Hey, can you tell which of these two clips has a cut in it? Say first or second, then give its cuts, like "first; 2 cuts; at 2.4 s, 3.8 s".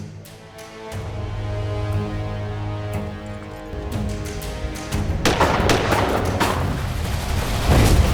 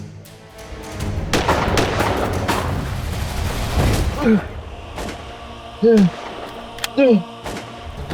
second; 2 cuts; at 0.8 s, 4.1 s